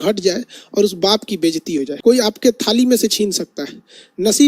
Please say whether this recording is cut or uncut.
cut